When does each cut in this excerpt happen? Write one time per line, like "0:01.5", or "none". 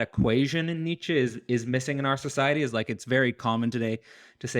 none